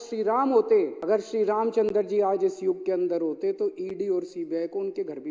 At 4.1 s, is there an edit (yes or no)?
no